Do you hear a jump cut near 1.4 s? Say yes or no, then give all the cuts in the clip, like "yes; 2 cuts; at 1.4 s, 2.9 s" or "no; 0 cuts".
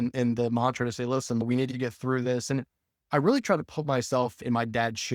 yes; 1 cut; at 1.4 s